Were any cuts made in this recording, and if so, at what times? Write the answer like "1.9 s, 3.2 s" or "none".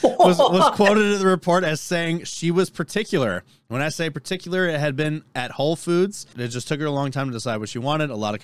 6.4 s